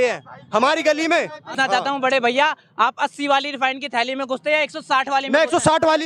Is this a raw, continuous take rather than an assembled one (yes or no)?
no